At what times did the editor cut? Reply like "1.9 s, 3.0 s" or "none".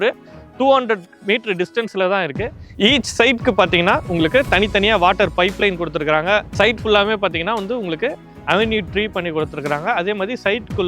2.8 s